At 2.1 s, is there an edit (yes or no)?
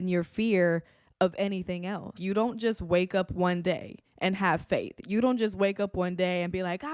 yes